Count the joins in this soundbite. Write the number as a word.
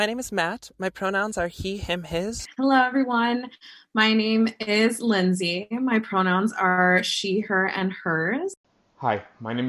two